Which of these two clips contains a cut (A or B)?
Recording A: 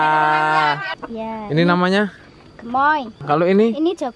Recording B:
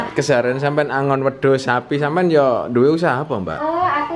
A